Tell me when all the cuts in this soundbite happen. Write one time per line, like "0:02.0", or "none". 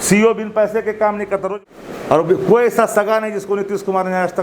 0:01.5

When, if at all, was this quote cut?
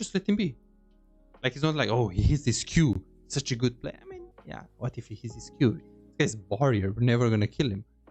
0:04.3

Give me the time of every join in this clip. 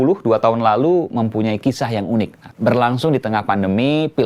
0:02.4

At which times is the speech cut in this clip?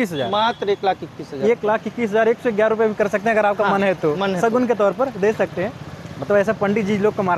none

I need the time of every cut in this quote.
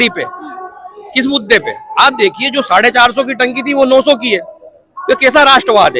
none

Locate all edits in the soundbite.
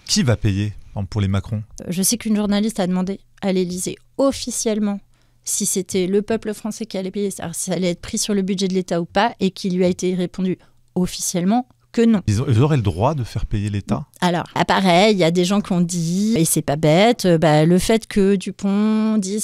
0:01.7
0:12.3
0:14.6
0:16.4

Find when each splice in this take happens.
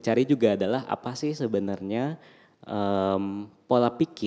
none

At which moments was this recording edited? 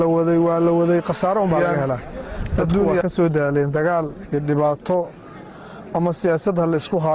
0:03.0

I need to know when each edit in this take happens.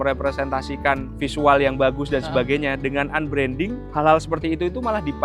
0:01.1
0:03.8

